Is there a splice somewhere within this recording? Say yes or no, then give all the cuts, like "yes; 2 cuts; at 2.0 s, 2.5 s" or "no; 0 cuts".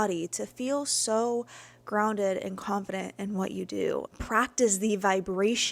yes; 1 cut; at 4.1 s